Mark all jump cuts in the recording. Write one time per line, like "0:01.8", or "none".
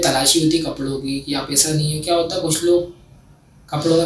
none